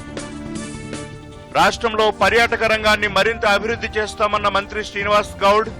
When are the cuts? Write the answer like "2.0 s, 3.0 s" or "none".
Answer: 1.1 s

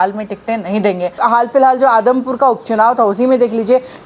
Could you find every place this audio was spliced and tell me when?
1.2 s

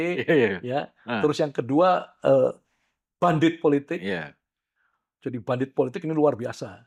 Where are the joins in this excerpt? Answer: none

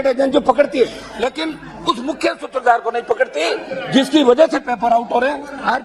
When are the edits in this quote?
none

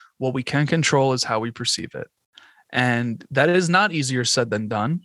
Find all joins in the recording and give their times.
none

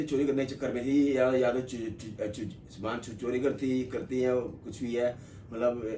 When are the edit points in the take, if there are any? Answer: none

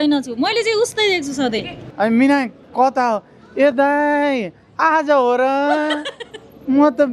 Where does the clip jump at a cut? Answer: 1.8 s

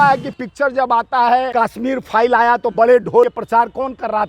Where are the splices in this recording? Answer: 1.5 s, 3.3 s

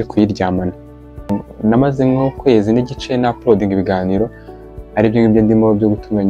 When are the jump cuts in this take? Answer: 1.3 s

